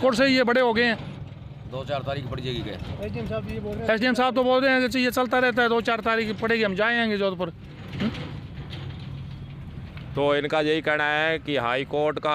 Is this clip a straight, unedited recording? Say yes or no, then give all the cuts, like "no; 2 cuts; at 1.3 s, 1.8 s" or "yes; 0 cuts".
yes; 0 cuts